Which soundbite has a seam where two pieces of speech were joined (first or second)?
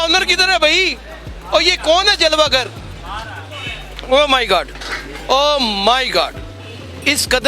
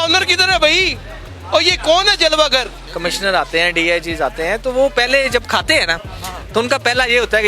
second